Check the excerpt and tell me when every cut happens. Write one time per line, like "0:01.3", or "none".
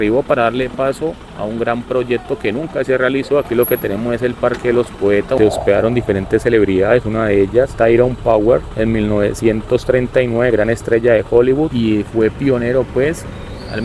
0:05.4
0:11.7